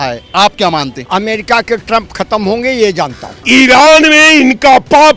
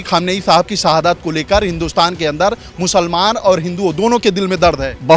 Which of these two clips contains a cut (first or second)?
first